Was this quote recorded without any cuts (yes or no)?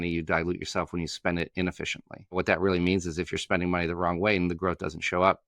no